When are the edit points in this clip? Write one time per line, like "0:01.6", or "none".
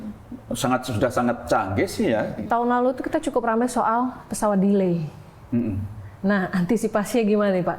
0:02.4